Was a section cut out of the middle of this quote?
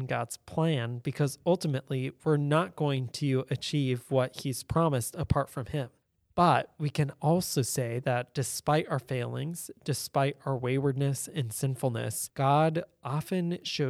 no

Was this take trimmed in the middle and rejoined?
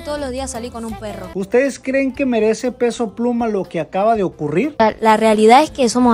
yes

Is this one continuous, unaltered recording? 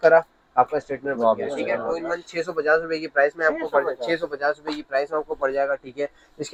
yes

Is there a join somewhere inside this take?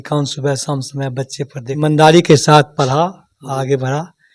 yes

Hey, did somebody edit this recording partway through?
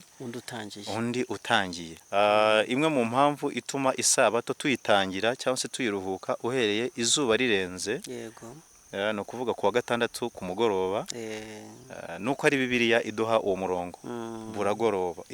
yes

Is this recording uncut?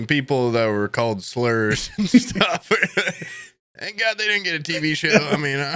yes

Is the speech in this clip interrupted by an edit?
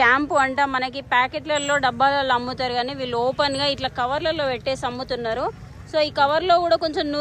no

